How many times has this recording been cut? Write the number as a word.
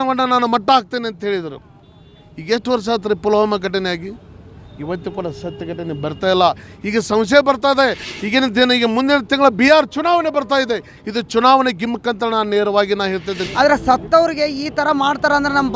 one